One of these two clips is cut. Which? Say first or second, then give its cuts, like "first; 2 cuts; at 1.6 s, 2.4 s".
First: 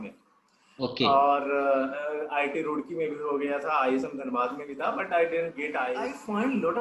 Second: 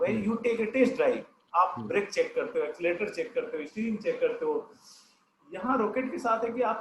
first; 1 cut; at 5.9 s